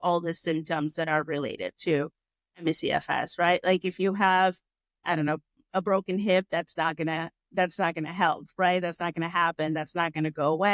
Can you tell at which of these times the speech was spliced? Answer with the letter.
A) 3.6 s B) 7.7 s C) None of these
C